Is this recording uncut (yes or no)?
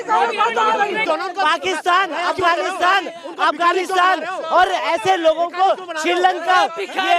no